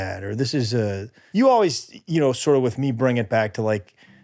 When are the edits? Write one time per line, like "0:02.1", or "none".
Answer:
0:01.2

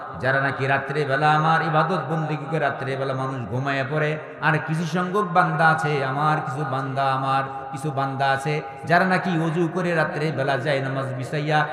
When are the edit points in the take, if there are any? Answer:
none

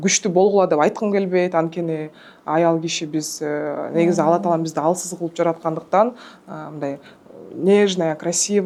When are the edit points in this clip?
none

